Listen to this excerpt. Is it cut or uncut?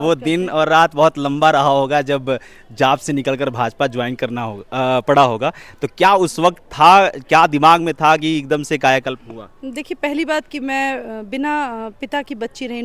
uncut